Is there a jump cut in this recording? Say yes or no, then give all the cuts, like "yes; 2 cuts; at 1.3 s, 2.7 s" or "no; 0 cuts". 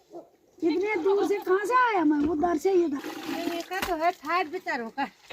yes; 1 cut; at 3.1 s